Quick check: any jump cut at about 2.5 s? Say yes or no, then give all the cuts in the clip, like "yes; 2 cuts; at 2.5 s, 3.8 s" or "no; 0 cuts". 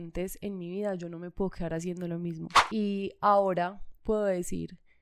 yes; 1 cut; at 2.5 s